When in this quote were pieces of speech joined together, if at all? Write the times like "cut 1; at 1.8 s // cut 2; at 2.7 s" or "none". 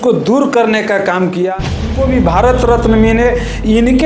cut 1; at 1.9 s